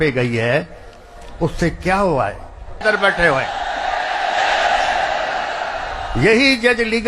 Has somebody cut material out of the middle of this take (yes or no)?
yes